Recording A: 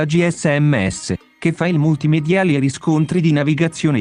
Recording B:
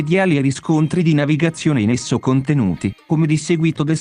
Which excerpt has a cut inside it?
B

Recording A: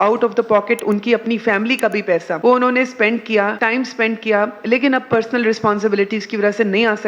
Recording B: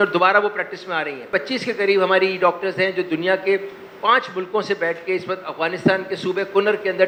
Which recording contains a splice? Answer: A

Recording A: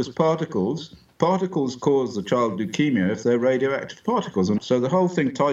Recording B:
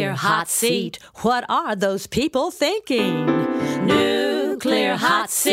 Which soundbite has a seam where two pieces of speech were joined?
A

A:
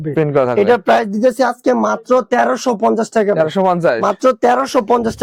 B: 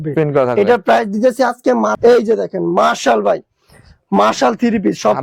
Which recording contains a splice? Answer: B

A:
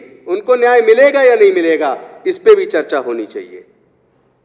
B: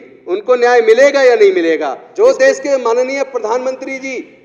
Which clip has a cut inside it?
B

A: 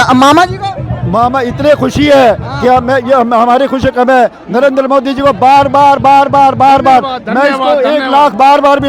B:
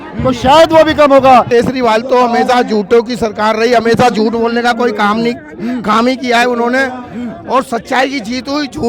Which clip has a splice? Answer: B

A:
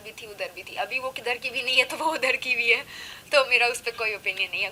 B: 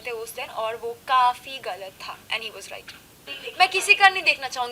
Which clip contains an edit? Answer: B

